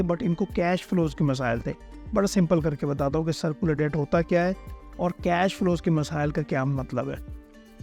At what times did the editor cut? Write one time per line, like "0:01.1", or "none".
none